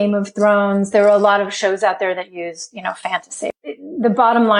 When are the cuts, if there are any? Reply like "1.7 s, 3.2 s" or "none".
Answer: 3.5 s